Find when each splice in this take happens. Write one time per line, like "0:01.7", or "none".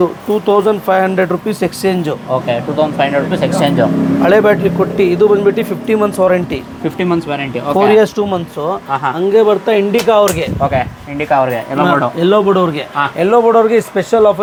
none